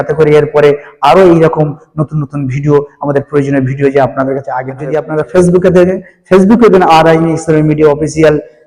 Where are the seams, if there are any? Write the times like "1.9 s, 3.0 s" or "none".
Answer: 4.9 s